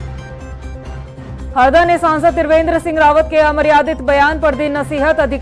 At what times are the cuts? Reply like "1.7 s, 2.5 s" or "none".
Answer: 0.9 s